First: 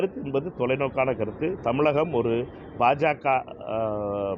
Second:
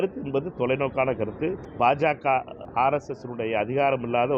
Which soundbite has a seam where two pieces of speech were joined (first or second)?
second